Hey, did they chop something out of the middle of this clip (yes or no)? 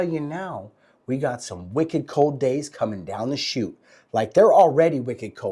no